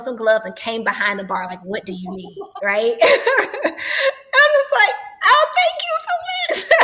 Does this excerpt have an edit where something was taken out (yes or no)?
no